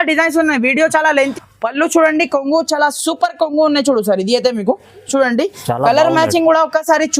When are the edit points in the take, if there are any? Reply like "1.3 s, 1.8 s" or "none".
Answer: 1.1 s